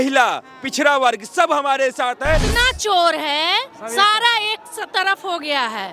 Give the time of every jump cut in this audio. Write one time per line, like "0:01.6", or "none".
0:02.5